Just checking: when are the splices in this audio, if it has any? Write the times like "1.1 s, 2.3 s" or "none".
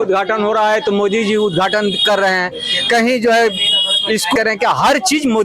4.3 s